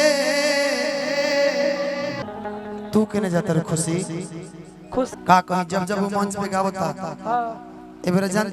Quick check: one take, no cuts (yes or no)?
no